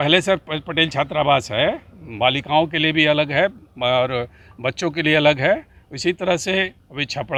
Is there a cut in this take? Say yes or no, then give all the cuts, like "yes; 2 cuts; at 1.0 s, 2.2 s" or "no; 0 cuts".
no; 0 cuts